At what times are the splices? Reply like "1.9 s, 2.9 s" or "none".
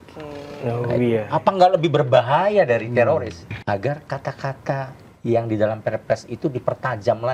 3.4 s